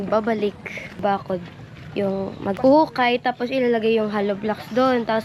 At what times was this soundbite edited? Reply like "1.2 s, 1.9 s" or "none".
1.0 s